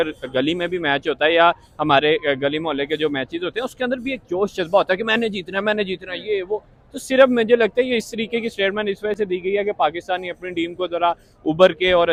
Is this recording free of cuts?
yes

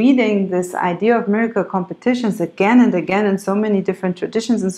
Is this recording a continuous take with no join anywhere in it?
yes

